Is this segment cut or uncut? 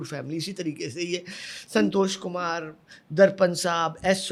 uncut